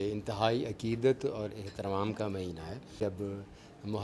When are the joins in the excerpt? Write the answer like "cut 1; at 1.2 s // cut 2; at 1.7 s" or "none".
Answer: cut 1; at 3.0 s